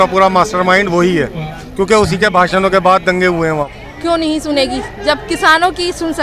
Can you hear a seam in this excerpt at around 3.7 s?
yes; 1 cut; at 3.7 s

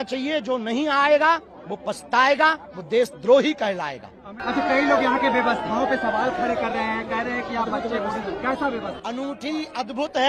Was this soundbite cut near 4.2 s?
no; 0 cuts

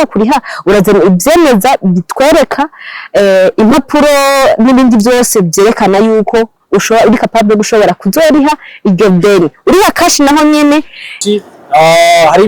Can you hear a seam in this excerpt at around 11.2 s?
yes; 1 cut; at 11.2 s

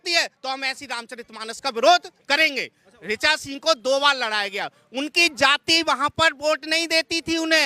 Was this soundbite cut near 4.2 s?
no; 1 cut; at 2.9 s

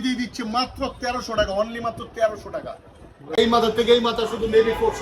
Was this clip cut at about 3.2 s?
yes; 1 cut; at 3.2 s

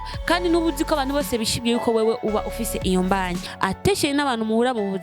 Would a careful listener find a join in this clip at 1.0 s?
no; 1 cut; at 3.5 s

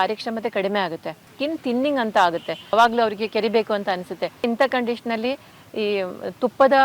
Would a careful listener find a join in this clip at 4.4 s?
yes; 3 cuts; at 1.3 s, 2.7 s, 4.4 s

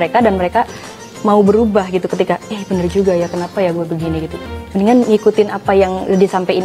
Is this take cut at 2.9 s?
no; 1 cut; at 4.4 s

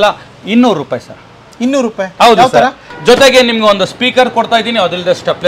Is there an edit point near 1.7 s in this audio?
no; 1 cut; at 2.9 s

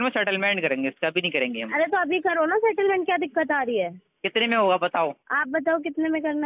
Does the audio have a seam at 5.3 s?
yes; 1 cut; at 5.3 s

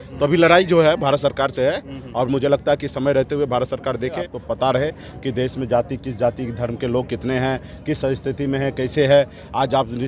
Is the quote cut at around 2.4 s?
no; 1 cut; at 4.3 s

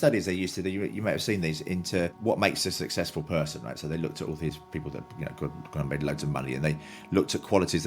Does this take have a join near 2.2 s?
yes; 1 cut; at 2.2 s

